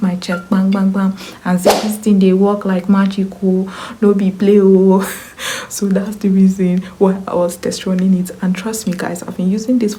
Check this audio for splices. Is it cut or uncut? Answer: uncut